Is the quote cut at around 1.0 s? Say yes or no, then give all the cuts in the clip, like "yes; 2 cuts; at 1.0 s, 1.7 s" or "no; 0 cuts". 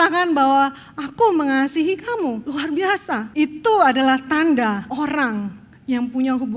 no; 3 cuts; at 2.4 s, 3.3 s, 4.9 s